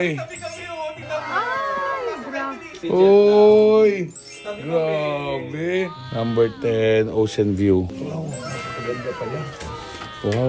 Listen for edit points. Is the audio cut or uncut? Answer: cut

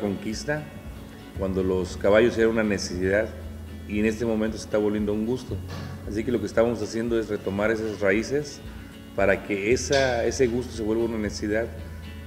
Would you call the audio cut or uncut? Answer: uncut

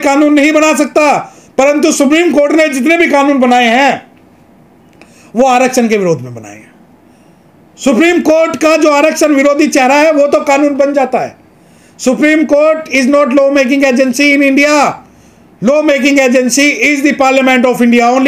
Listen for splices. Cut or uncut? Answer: uncut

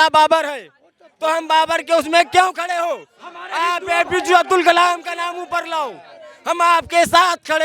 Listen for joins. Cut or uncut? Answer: uncut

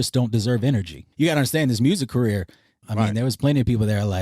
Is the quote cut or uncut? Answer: cut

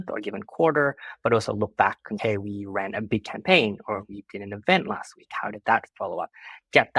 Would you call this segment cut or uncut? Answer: uncut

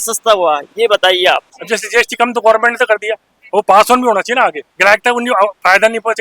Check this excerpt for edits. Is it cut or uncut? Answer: cut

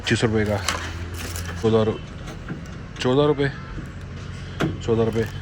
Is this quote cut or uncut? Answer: cut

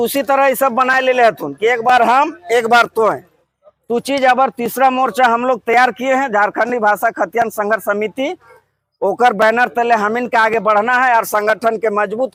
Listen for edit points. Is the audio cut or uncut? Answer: uncut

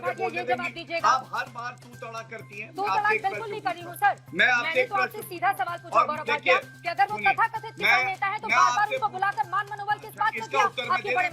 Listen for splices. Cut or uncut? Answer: uncut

